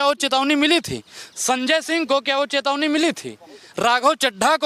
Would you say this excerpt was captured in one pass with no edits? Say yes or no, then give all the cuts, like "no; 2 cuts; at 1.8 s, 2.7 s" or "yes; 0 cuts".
yes; 0 cuts